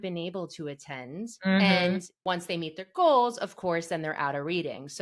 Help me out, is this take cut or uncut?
cut